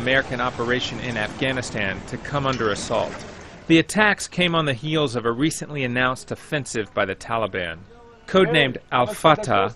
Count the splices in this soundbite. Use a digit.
1